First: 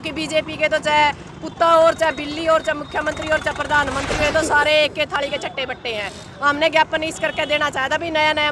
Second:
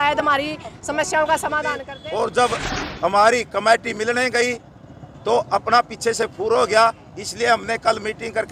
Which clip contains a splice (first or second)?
second